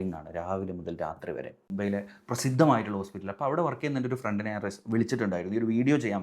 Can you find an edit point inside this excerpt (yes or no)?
yes